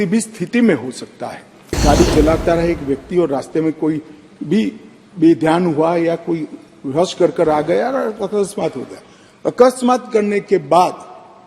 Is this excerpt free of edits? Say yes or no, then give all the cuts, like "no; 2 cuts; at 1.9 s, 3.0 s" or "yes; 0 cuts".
no; 1 cut; at 1.8 s